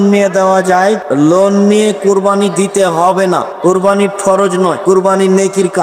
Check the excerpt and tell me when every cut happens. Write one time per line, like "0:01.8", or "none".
0:01.0
0:03.5
0:04.8